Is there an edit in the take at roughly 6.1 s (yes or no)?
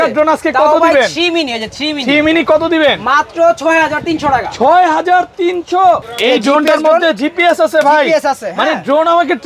yes